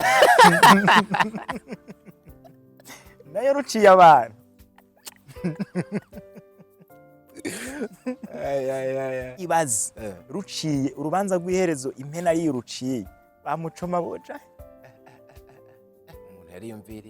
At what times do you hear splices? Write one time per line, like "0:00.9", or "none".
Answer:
0:09.3